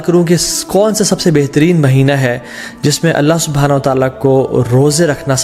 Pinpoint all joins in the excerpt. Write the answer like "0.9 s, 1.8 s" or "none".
none

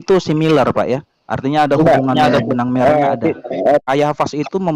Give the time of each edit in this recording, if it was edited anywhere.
3.8 s

